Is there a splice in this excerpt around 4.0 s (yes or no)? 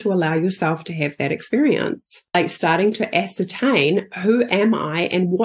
no